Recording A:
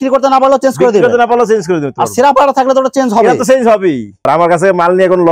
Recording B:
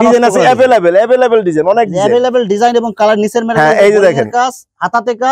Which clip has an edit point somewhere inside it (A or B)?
A